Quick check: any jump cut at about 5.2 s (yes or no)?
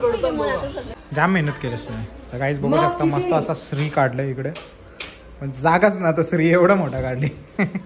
no